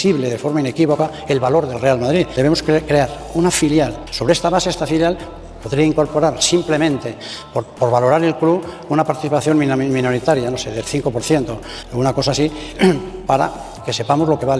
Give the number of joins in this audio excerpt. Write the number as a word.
three